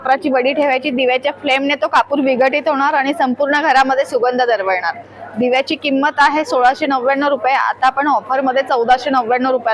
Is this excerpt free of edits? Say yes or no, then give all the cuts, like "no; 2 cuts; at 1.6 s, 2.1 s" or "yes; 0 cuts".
yes; 0 cuts